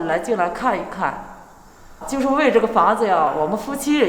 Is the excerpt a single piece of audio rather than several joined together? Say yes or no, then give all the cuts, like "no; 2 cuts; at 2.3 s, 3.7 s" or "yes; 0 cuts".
no; 2 cuts; at 2.0 s, 3.3 s